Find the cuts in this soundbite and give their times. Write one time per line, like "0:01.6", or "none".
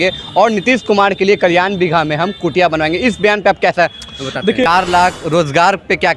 0:04.7